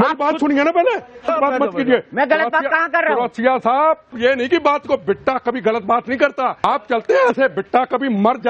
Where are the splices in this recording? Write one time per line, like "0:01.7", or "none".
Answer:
0:01.3
0:04.1
0:06.6